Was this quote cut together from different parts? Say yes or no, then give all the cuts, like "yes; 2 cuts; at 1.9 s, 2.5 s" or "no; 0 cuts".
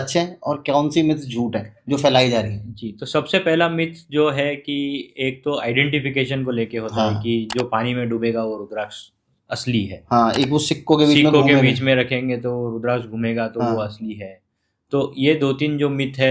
no; 0 cuts